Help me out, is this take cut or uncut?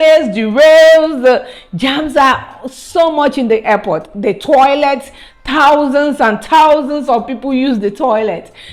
uncut